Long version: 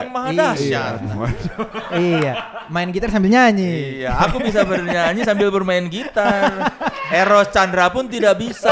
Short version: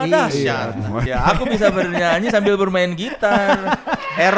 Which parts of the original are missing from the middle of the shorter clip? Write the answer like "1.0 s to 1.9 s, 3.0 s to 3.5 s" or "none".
1.3 s to 4.0 s